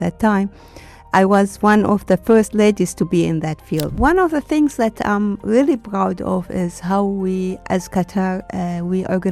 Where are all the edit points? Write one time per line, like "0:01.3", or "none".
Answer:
0:03.9